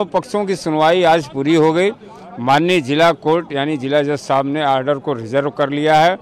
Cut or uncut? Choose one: uncut